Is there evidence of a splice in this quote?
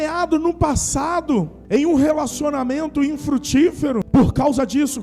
yes; 2 cuts; at 1.6 s, 4.1 s

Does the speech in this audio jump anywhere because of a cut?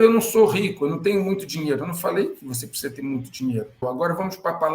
yes; 1 cut; at 3.8 s

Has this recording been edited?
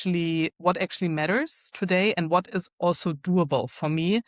no; 0 cuts

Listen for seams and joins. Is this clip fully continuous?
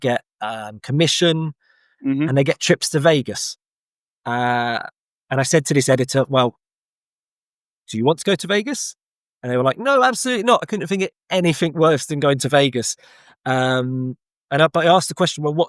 yes; 0 cuts

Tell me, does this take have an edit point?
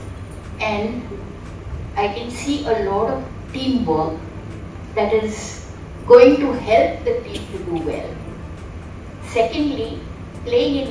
no; 0 cuts

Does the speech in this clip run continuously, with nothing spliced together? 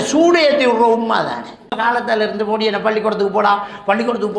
no; 1 cut; at 1.8 s

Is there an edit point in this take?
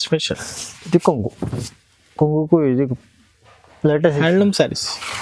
no; 0 cuts

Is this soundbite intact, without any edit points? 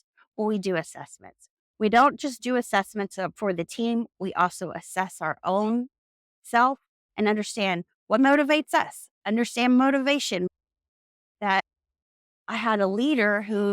no; 2 cuts; at 10.5 s, 11.6 s

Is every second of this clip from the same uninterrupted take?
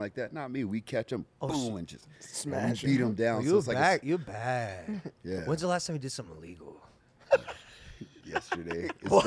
yes; 0 cuts

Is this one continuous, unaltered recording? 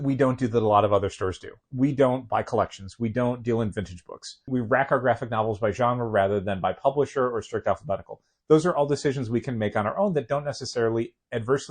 no; 2 cuts; at 1.6 s, 4.5 s

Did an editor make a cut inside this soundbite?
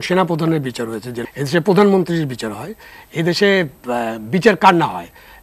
yes; 1 cut; at 1.2 s

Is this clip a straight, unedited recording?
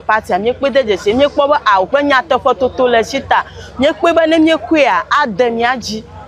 yes; 0 cuts

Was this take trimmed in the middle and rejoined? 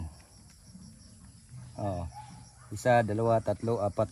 no; 0 cuts

